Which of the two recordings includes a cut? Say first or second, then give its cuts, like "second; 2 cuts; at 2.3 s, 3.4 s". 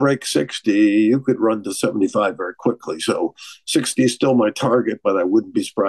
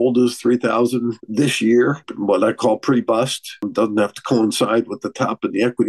second; 3 cuts; at 1.2 s, 2.1 s, 3.7 s